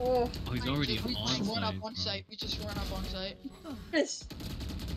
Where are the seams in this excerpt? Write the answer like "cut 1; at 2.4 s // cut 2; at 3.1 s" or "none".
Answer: cut 1; at 3.9 s